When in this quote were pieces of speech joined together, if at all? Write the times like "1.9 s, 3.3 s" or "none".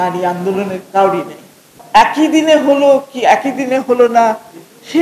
1.8 s